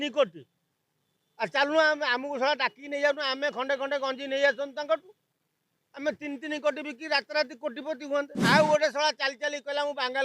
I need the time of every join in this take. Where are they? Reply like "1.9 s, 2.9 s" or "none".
8.4 s